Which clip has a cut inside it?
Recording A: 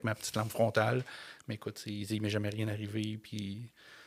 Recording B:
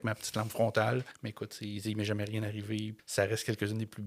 B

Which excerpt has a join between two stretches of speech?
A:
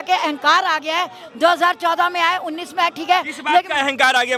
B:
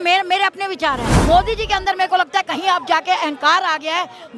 B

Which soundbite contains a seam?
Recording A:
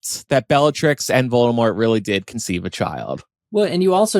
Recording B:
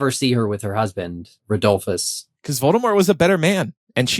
B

